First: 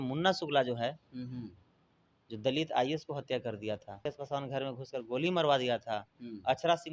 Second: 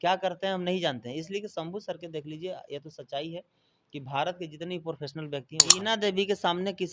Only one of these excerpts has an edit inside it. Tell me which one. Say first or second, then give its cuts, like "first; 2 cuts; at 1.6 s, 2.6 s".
second; 1 cut; at 5.8 s